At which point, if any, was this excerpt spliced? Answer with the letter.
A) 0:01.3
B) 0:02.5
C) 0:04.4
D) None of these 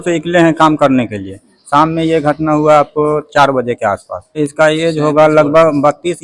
C